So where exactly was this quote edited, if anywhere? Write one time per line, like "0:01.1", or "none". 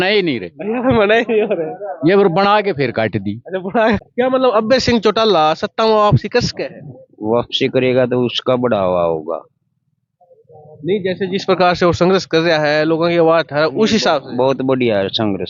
0:04.1